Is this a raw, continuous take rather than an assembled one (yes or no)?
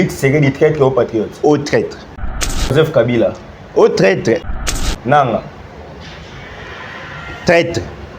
no